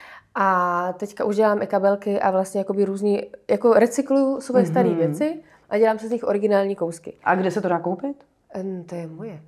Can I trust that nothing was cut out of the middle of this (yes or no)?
yes